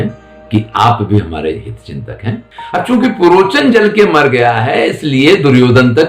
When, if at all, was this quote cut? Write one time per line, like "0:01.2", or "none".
0:02.5